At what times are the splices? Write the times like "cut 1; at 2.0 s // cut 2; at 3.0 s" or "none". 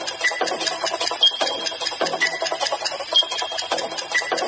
none